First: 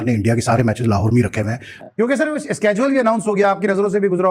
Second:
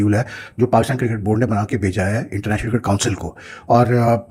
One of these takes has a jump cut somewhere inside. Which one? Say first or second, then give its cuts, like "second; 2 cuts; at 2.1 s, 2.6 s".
first; 1 cut; at 1.7 s